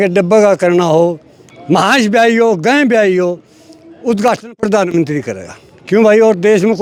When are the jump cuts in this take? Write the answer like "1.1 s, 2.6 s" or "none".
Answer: none